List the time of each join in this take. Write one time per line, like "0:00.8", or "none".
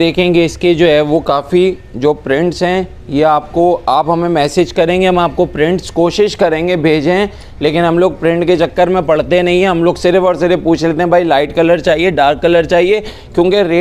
none